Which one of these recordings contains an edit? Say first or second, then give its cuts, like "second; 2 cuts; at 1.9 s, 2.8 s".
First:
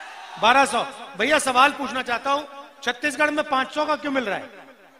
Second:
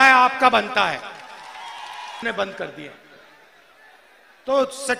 second; 1 cut; at 2.2 s